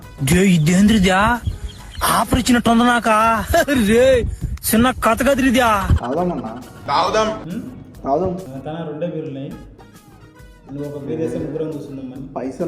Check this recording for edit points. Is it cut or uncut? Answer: cut